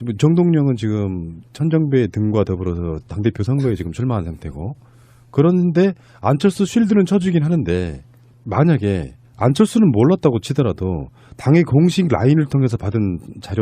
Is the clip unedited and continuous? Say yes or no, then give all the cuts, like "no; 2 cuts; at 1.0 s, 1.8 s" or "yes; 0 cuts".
no; 1 cut; at 7.7 s